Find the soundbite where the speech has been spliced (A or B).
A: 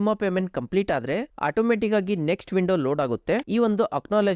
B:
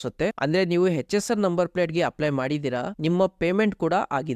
A